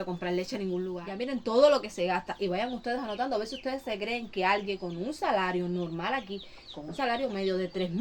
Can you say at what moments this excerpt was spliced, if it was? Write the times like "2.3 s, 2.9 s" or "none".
1.2 s